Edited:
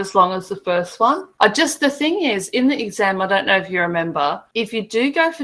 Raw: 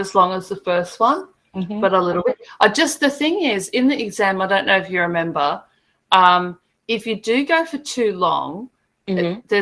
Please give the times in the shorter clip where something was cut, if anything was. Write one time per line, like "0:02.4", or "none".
0:01.3
0:04.4